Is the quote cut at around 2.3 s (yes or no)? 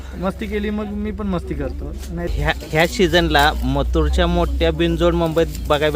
yes